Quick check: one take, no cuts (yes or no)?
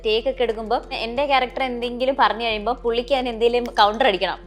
no